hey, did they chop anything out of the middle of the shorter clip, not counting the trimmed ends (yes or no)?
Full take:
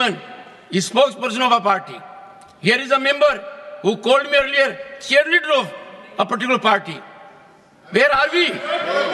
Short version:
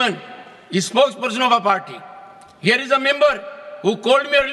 no